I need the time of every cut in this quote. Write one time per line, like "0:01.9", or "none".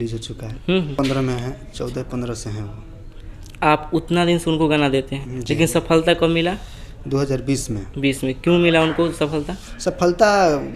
0:01.0